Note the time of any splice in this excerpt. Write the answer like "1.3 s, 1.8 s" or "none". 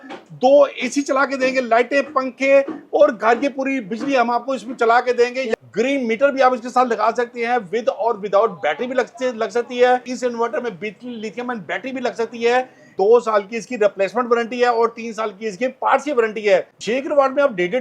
5.5 s, 10.1 s, 12.9 s, 16.8 s